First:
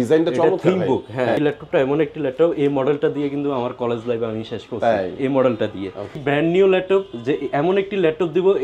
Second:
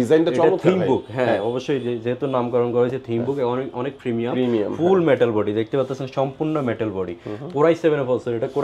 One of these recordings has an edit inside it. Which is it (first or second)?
first